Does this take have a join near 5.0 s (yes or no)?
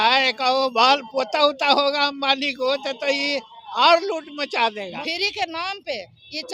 yes